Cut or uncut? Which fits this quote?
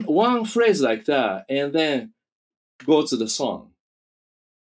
uncut